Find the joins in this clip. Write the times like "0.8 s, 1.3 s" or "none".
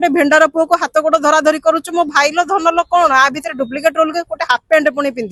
none